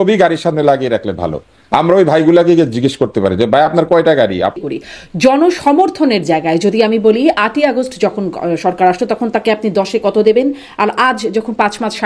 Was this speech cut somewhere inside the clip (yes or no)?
yes